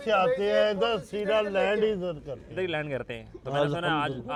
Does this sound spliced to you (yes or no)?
no